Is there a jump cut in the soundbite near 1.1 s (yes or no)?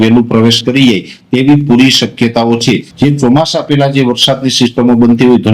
no